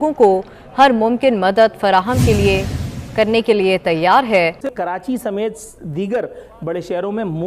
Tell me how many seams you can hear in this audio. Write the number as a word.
one